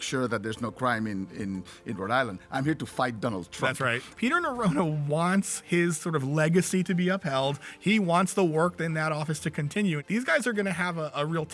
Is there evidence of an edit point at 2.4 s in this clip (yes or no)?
no